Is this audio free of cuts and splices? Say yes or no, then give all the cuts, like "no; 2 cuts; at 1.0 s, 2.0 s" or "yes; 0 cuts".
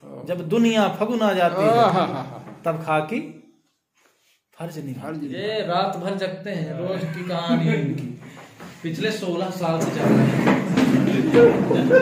no; 1 cut; at 5.4 s